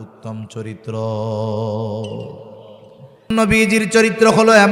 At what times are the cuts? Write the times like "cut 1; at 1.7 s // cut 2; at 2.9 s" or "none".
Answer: cut 1; at 3.3 s